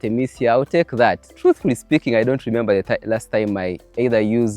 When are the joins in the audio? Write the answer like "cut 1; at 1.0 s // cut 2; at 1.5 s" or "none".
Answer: cut 1; at 1.3 s